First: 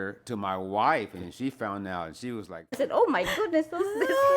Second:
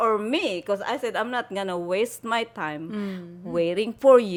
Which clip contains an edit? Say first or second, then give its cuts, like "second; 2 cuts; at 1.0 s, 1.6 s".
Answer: first; 1 cut; at 2.8 s